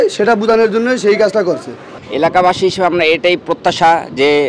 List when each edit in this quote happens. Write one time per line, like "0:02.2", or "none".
none

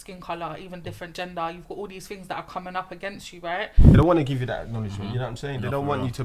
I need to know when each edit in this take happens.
0:03.9

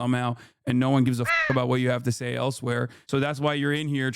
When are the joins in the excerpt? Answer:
0:03.0

